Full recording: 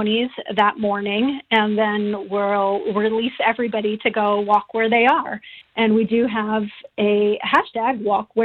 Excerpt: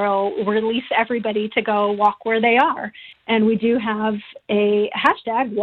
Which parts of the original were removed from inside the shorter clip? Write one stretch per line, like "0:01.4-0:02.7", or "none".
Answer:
none